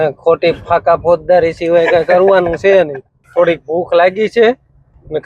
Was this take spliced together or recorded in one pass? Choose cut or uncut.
cut